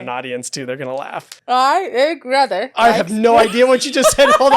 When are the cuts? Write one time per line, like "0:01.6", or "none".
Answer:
0:01.3